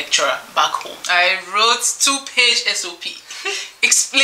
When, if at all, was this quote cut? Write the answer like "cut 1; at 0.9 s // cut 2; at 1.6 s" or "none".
cut 1; at 0.9 s